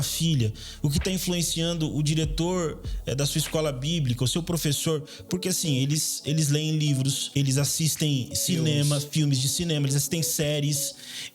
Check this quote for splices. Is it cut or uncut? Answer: cut